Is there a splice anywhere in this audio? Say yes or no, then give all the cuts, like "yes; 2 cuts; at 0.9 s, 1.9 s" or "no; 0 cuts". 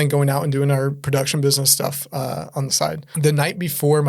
yes; 1 cut; at 3.1 s